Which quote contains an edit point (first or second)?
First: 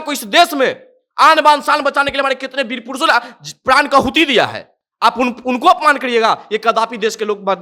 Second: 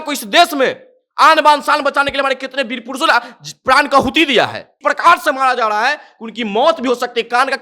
second